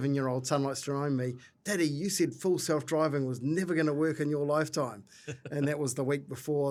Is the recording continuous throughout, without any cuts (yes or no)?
yes